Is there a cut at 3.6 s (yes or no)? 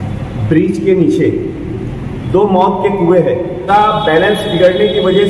yes